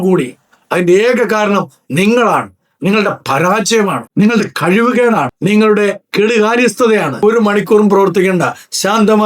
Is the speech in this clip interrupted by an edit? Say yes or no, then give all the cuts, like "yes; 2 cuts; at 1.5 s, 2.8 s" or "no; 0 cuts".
yes; 1 cut; at 7.2 s